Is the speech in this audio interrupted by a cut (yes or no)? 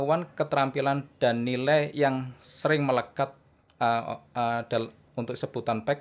no